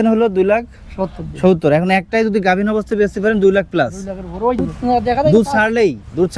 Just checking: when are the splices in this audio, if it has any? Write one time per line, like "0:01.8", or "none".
0:04.6